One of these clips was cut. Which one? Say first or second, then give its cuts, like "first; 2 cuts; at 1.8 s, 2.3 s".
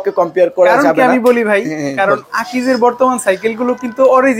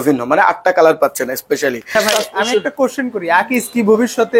second; 1 cut; at 2.1 s